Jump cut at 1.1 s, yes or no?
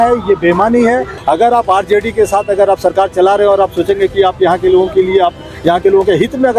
yes